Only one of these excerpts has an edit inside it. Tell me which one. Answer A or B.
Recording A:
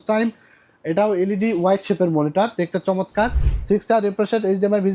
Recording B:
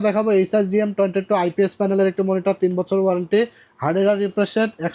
A